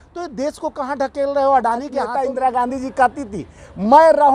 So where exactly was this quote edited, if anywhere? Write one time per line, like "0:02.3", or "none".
0:02.1